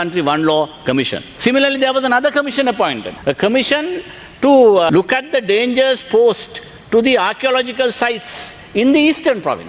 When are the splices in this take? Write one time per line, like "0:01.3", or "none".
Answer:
0:01.2
0:03.1
0:04.9

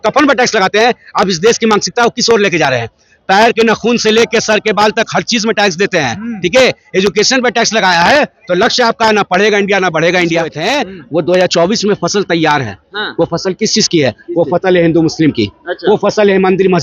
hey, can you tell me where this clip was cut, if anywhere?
0:10.6

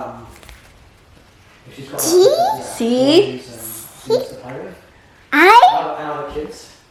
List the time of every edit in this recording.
none

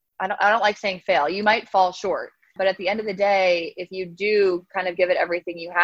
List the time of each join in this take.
0:02.5

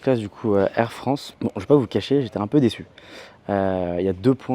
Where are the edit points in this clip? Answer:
0:01.3

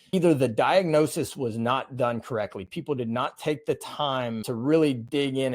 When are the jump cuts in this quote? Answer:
0:04.4

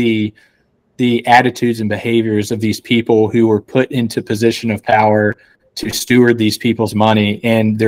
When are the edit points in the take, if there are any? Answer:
none

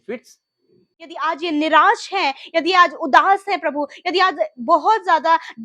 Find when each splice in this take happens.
0:01.2

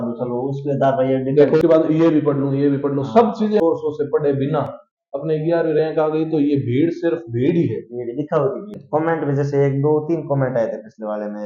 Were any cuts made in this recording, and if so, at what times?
0:01.6
0:03.6
0:08.8

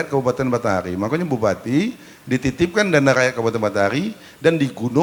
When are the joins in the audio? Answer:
none

